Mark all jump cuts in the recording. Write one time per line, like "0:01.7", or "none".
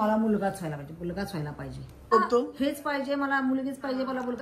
0:02.1

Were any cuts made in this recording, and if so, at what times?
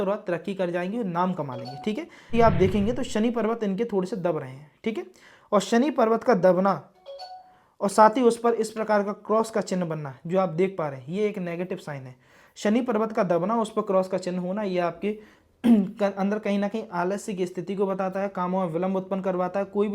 0:02.3

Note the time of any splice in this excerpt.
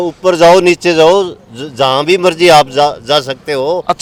none

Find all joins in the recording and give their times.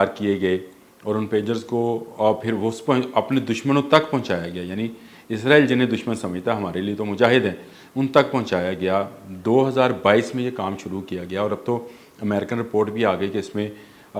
none

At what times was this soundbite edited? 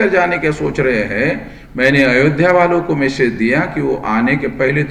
none

